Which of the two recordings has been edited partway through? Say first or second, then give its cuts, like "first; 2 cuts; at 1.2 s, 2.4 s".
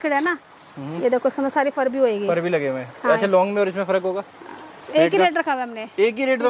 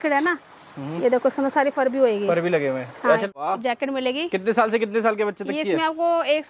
second; 1 cut; at 3.2 s